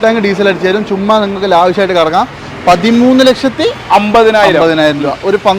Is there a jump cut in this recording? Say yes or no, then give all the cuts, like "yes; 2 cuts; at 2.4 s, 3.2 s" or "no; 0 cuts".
no; 0 cuts